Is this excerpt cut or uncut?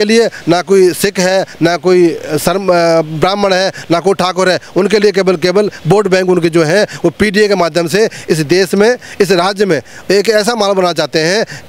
uncut